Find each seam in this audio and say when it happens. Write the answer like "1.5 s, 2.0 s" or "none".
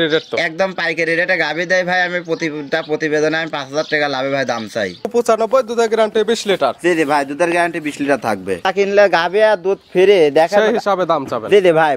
5.1 s, 8.6 s

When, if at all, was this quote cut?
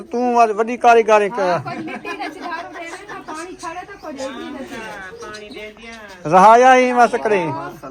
none

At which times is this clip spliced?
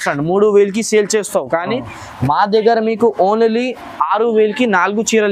none

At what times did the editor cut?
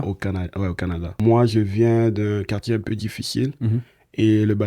1.1 s

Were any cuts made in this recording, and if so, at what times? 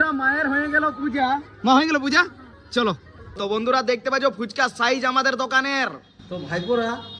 3.3 s

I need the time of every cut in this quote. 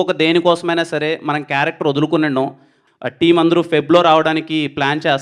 2.8 s

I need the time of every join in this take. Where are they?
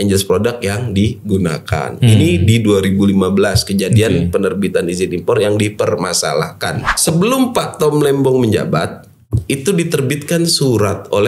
6.7 s

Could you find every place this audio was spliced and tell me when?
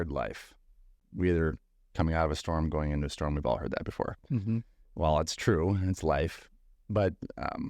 1.0 s

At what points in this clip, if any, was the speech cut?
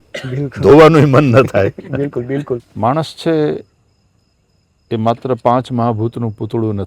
2.7 s

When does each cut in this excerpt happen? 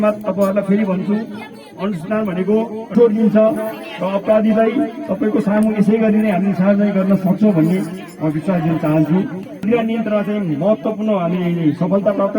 2.9 s, 9.6 s

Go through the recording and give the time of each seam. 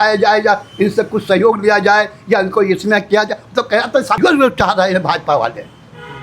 4.2 s

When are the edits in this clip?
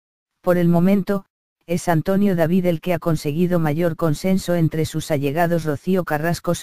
1.3 s

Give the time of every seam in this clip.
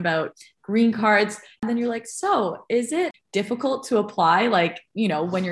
1.6 s, 3.2 s

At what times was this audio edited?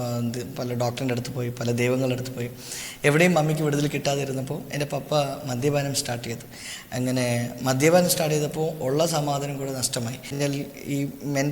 10.3 s

